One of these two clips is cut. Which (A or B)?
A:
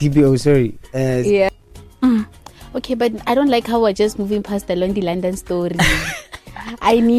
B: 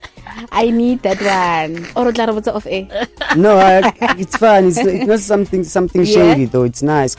A